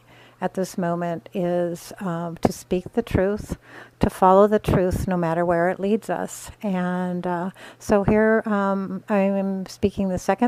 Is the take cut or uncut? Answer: uncut